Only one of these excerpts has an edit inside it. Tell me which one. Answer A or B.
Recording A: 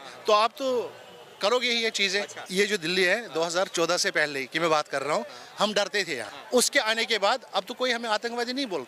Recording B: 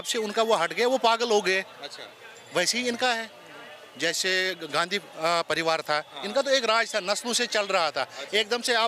A